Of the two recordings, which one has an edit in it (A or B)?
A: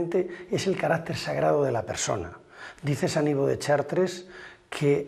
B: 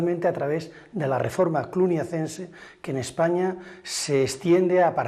B